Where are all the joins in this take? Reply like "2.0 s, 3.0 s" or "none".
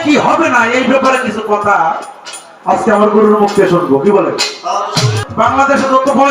none